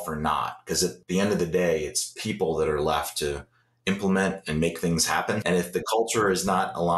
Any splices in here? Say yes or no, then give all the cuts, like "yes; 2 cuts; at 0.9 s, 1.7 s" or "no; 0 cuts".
yes; 2 cuts; at 1.0 s, 5.4 s